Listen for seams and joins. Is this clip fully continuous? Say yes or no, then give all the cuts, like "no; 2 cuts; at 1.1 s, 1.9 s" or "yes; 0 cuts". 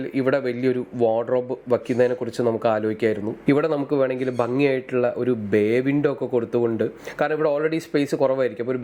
no; 1 cut; at 3.3 s